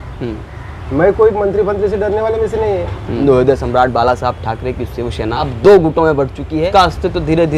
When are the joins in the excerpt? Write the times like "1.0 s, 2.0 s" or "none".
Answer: 3.2 s, 5.5 s, 6.7 s